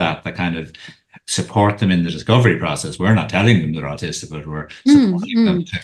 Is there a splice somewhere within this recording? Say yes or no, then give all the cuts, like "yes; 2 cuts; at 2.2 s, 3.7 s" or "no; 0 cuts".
no; 0 cuts